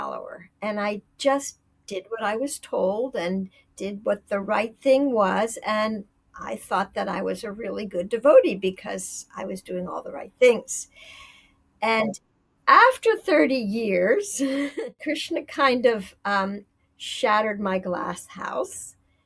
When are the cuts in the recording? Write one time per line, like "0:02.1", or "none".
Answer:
0:15.0